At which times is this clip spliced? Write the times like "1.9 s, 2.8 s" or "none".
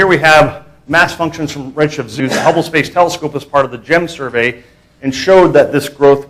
none